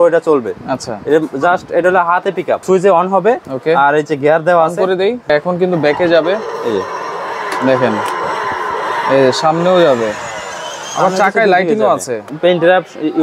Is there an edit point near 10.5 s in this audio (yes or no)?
no